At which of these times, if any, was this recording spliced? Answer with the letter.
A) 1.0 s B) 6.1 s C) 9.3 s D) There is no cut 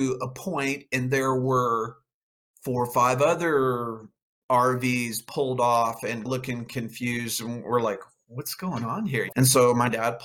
C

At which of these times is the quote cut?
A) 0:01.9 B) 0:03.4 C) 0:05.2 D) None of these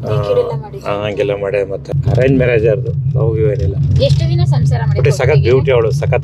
A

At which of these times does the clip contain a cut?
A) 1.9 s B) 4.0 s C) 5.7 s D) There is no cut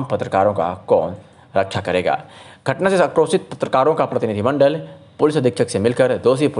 D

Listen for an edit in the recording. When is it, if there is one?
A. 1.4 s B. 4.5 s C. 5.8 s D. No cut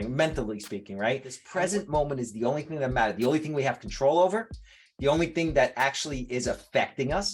A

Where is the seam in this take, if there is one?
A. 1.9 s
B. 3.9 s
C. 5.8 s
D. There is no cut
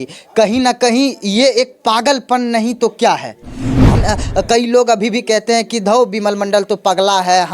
B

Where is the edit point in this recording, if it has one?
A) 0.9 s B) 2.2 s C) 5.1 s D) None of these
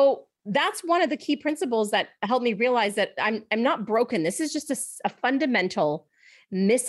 D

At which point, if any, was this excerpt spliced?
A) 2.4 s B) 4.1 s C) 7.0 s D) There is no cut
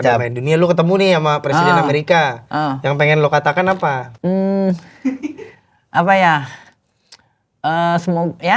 B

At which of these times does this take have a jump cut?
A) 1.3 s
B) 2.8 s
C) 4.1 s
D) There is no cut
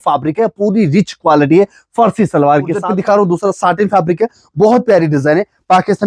B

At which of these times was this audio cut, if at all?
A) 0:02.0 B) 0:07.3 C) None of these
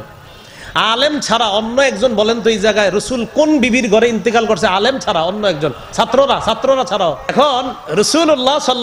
B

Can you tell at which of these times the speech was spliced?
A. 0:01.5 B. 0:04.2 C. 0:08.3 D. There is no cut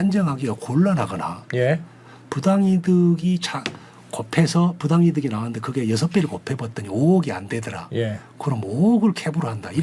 D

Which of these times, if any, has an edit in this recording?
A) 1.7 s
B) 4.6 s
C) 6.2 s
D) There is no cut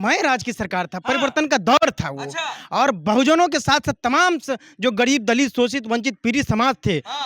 D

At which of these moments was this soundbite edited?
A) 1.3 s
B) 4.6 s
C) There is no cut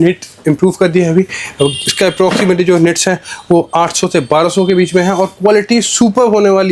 C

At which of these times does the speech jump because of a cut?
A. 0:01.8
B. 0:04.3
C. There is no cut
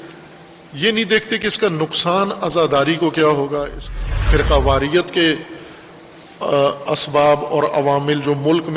B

